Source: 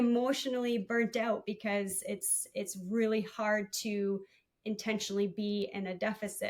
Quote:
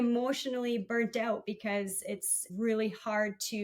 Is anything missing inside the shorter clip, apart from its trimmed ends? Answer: yes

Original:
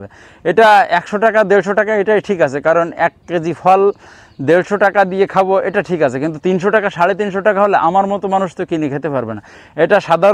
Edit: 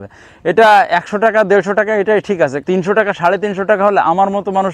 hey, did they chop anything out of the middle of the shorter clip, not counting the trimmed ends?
yes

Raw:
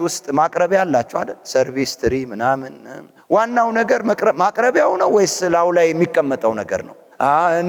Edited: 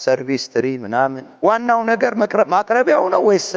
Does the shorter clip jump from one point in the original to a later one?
yes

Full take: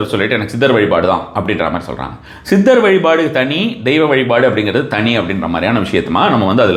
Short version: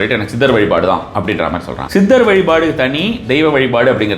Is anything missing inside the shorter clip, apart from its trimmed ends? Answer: yes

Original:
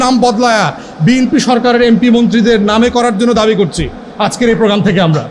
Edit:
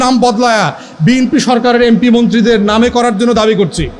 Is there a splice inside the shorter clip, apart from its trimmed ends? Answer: no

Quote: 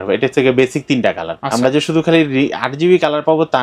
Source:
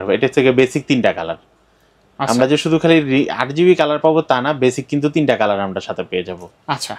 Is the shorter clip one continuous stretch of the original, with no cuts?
no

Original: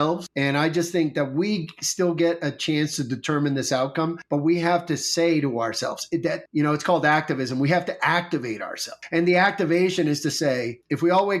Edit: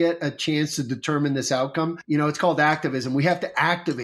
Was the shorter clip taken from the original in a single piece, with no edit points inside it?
no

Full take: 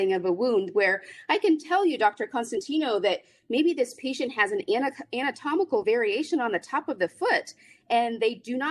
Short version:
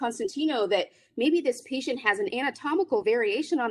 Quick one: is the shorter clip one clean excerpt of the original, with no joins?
no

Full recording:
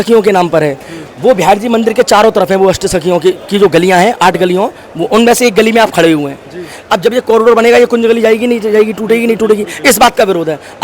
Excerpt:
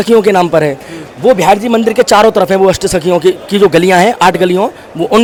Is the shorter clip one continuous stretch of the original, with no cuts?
yes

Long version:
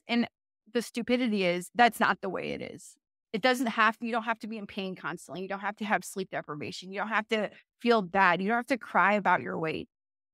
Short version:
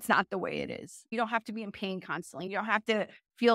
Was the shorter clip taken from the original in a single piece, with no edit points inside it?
no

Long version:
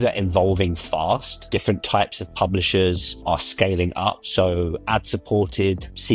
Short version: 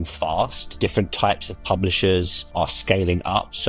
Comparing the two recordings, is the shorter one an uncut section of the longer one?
yes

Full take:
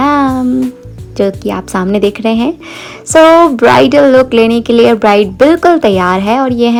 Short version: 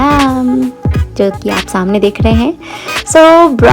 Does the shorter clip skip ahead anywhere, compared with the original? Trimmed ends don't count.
no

